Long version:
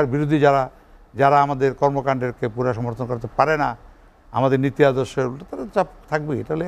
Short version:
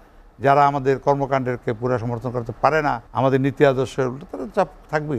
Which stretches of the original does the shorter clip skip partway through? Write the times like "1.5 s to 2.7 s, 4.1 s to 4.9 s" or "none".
3.8 s to 4.2 s